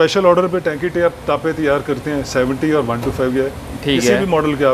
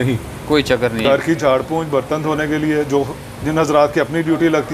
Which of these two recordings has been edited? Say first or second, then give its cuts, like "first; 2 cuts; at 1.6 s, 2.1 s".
second; 1 cut; at 1.1 s